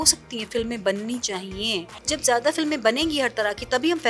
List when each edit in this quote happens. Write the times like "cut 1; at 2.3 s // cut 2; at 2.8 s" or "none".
cut 1; at 2.0 s